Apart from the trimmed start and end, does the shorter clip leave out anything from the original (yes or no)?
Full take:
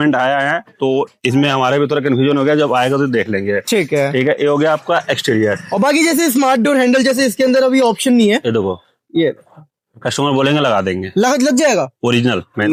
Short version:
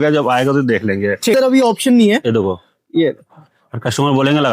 yes